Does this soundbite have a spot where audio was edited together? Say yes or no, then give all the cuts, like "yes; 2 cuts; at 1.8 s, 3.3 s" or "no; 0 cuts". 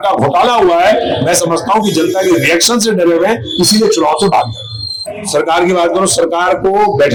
no; 0 cuts